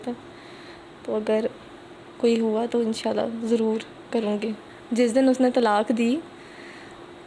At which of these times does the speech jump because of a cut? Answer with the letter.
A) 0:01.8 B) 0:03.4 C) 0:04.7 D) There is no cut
C